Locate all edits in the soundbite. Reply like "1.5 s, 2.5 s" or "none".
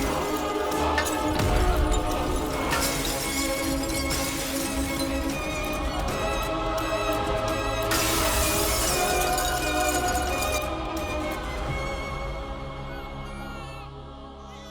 2.6 s, 5.7 s